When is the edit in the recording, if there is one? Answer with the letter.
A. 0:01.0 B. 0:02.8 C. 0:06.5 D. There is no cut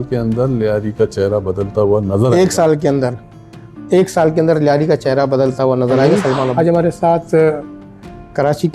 C